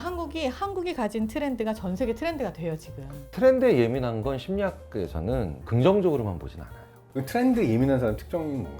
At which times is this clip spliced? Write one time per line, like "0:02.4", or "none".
0:03.3
0:05.6
0:07.1